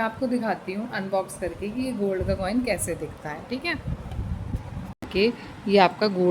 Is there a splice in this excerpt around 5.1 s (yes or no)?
yes